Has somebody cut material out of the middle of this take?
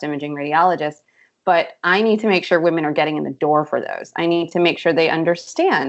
no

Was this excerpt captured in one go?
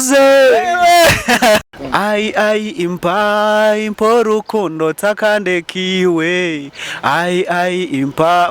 no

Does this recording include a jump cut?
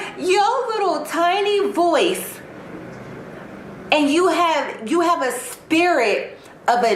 no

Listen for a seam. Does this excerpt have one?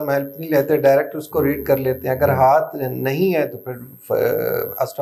no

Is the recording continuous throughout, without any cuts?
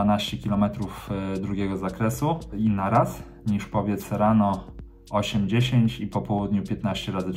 no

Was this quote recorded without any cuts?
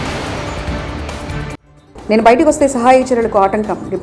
yes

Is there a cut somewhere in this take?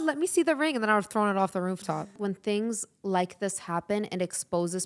yes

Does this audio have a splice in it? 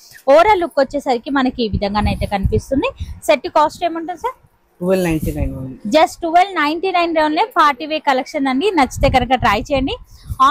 no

